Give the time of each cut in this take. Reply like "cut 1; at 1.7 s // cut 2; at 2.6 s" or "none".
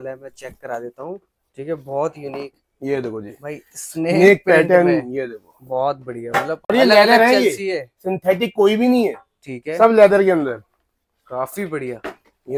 none